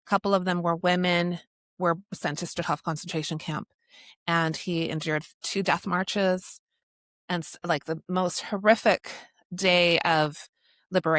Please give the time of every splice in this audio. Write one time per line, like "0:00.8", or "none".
none

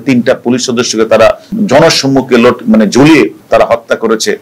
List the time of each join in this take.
0:01.5

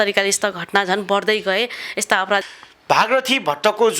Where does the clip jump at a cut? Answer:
0:02.4

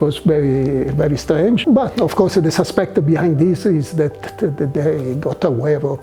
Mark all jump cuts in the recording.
0:01.6

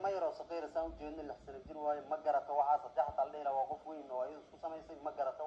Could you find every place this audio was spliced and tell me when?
none

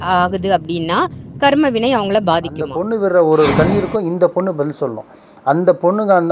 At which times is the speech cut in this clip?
0:02.8

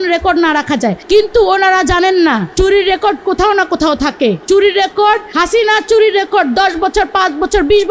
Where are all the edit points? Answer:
0:01.0
0:02.5
0:04.4
0:05.3

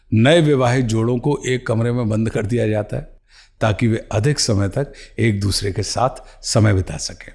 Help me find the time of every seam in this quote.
none

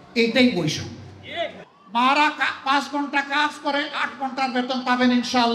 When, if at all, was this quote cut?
0:01.7

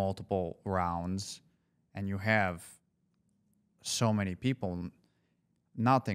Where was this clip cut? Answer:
none

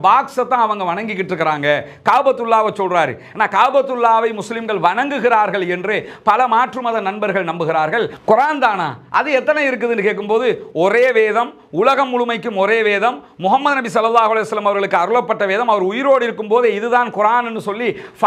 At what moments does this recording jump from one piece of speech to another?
0:08.2

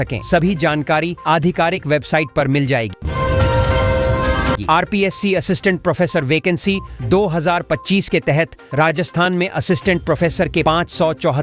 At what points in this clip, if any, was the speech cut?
0:03.0
0:04.6

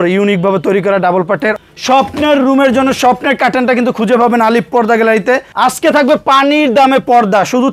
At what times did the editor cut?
0:01.5
0:05.5

